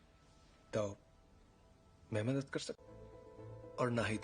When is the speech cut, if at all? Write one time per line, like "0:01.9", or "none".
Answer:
none